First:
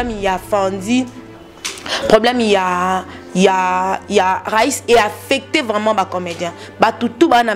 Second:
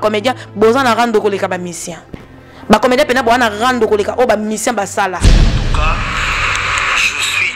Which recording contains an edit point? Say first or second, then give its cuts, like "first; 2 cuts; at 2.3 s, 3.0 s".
second; 1 cut; at 5.6 s